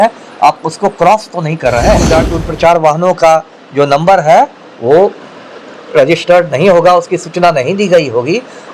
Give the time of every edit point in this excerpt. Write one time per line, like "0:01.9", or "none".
0:02.1

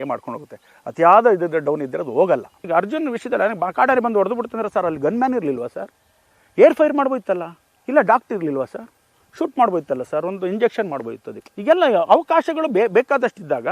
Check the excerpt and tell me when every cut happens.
0:02.6

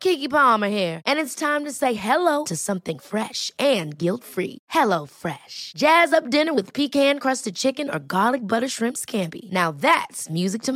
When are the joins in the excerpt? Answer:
none

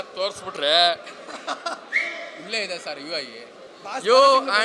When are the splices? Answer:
0:03.6

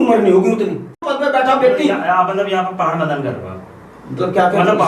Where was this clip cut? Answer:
0:01.1

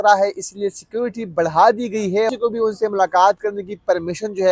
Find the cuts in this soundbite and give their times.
0:02.3

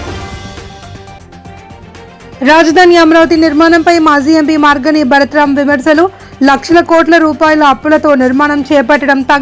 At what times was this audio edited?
none

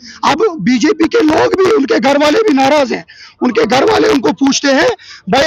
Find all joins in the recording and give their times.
none

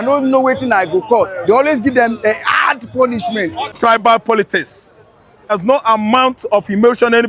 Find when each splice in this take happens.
0:03.8
0:05.6

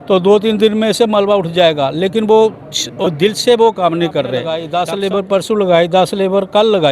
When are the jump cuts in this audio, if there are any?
0:04.6

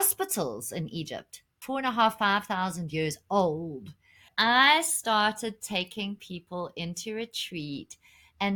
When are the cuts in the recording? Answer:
0:01.6
0:04.3

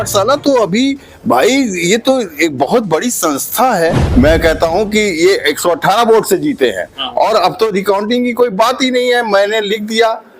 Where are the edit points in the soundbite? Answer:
0:04.0

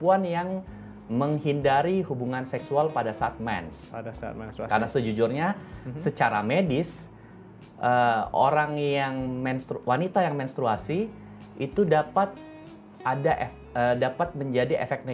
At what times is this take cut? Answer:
none

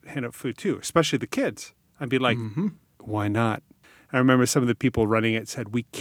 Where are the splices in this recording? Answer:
0:02.9
0:03.7

